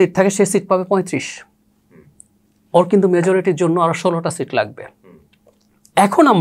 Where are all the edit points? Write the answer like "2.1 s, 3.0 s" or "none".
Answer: none